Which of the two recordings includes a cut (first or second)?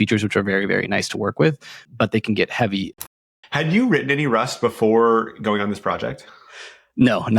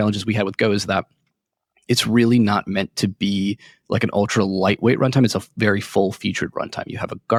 first